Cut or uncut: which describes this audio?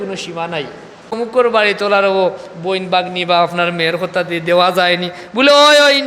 cut